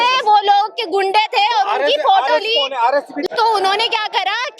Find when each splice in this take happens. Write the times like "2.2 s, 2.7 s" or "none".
3.2 s